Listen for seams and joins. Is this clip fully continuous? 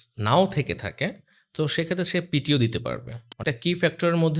no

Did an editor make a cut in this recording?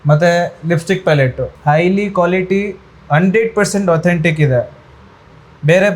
yes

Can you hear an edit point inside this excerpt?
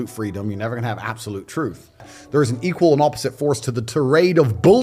yes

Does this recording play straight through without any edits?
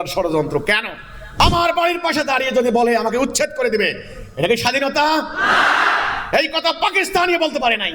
no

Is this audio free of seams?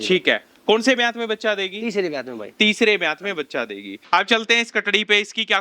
no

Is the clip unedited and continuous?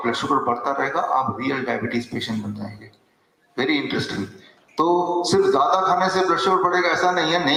yes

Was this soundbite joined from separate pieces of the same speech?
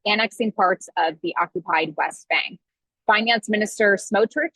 yes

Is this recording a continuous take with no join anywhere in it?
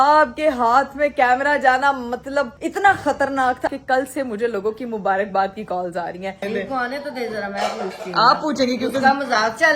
no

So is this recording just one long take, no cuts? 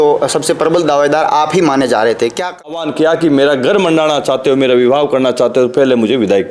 no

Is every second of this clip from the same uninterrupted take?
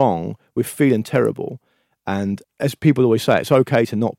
no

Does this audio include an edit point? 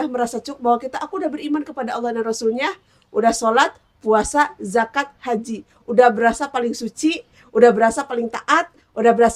no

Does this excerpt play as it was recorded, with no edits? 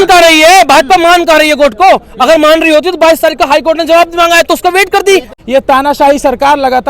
no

